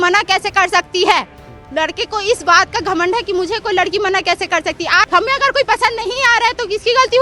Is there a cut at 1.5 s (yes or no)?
no